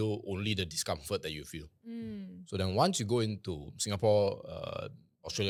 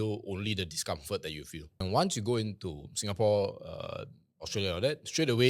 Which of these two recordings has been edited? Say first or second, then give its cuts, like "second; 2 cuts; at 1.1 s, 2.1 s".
second; 1 cut; at 1.8 s